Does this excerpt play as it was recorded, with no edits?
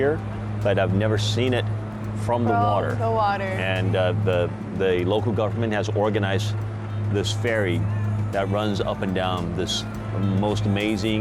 yes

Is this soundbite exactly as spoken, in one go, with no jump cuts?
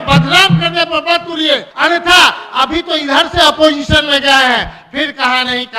no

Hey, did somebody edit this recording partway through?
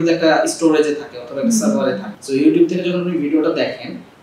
yes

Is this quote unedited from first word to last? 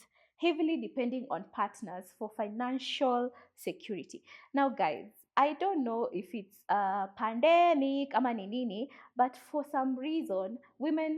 yes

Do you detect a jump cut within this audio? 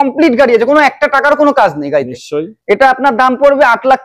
no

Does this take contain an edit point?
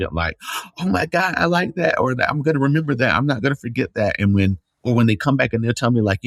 no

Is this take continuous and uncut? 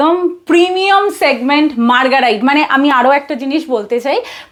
yes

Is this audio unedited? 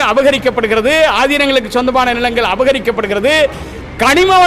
yes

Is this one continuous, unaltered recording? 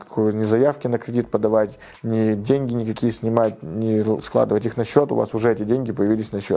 yes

